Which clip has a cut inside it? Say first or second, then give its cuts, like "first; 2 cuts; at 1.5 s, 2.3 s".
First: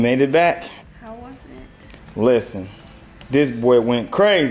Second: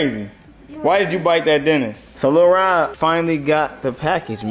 second; 2 cuts; at 2.0 s, 2.9 s